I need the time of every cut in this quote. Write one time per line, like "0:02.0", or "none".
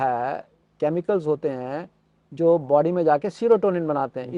none